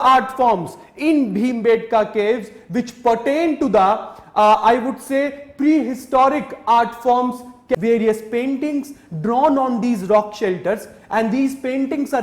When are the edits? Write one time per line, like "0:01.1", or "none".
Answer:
0:07.8